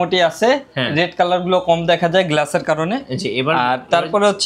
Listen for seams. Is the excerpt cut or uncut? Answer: uncut